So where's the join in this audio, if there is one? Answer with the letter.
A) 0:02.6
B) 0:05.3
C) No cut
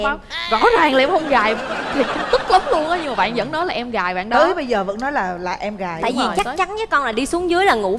C